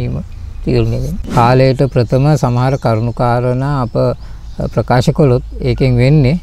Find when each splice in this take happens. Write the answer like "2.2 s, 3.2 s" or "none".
1.1 s